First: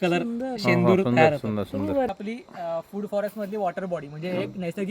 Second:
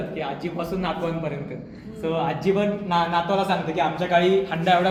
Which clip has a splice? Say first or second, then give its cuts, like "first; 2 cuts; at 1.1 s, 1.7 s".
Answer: first; 1 cut; at 2.1 s